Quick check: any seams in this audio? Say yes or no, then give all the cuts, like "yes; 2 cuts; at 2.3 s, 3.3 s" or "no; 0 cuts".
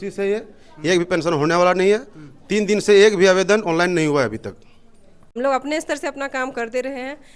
yes; 1 cut; at 5.4 s